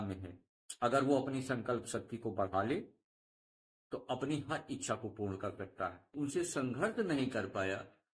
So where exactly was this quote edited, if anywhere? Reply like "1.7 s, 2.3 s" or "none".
6.1 s